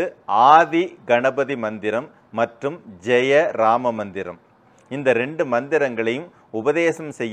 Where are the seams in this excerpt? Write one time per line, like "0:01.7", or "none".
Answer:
none